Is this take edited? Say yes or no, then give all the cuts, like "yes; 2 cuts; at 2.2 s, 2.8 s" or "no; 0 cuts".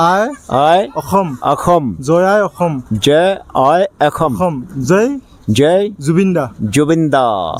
no; 0 cuts